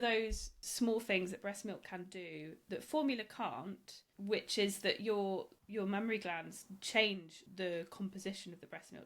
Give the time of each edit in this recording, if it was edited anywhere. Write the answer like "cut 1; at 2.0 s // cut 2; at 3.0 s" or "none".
cut 1; at 5.6 s // cut 2; at 7.4 s